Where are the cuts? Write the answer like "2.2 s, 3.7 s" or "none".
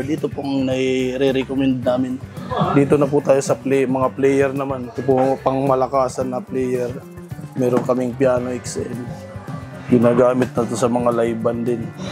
2.5 s, 9.8 s